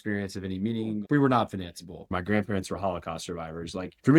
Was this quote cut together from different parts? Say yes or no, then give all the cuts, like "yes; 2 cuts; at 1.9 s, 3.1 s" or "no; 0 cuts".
yes; 1 cut; at 2.1 s